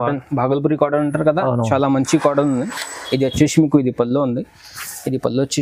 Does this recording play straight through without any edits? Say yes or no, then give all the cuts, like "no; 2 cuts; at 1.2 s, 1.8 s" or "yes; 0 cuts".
yes; 0 cuts